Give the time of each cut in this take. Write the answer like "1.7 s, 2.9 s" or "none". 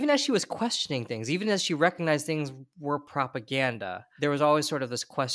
4.0 s

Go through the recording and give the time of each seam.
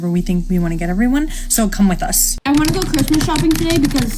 2.3 s

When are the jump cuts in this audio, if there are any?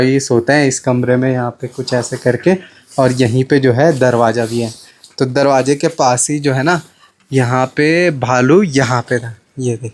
none

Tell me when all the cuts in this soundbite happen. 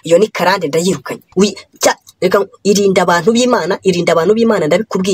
1.2 s

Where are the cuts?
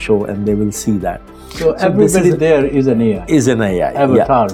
none

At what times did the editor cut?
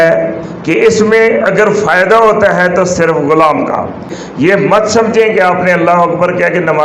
4.2 s

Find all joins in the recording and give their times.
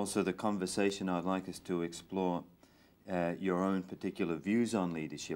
2.6 s

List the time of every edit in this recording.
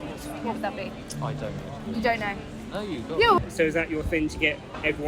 3.4 s

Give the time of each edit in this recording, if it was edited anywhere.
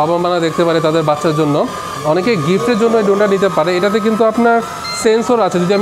none

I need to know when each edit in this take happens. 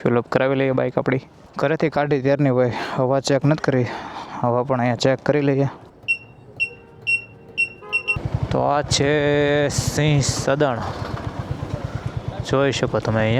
1.4 s, 5.9 s, 8.2 s

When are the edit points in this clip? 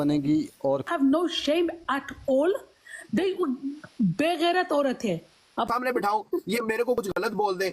0.9 s, 5.7 s

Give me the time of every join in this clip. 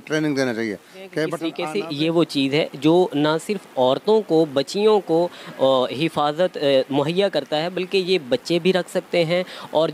1.5 s

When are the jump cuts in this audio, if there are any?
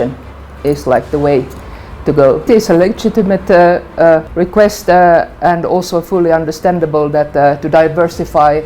2.5 s, 4.3 s

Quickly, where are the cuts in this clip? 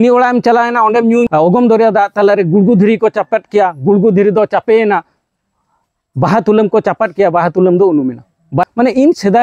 1.3 s, 8.7 s

